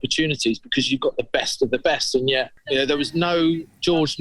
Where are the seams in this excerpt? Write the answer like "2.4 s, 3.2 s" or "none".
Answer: 2.6 s